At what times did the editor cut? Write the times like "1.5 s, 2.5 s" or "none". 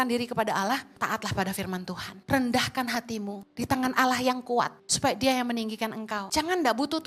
0.9 s, 2.1 s, 3.4 s, 4.8 s, 6.2 s